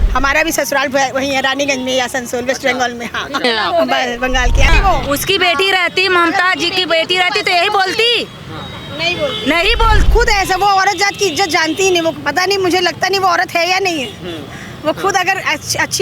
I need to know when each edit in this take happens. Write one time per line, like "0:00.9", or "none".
0:03.4
0:04.7
0:10.1

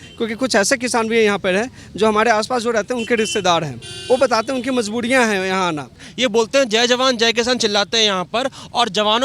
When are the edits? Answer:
0:06.0

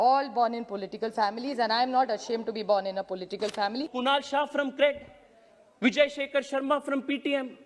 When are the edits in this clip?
0:03.9

